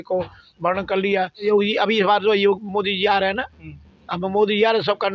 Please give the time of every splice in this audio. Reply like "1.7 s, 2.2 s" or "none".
1.5 s